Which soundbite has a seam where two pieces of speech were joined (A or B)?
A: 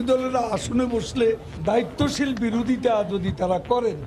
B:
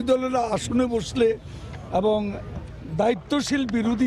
A